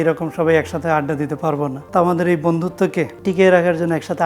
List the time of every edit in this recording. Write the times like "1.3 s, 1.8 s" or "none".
1.8 s, 3.1 s